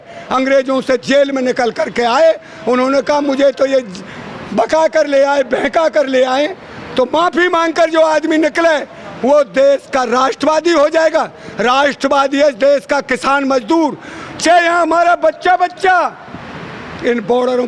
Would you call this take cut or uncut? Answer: uncut